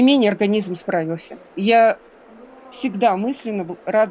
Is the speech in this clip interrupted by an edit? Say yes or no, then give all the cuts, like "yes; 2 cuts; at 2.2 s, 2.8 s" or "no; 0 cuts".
no; 0 cuts